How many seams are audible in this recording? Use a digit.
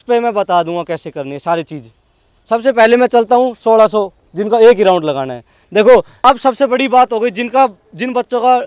1